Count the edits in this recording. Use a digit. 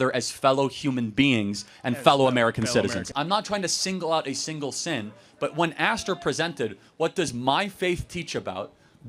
1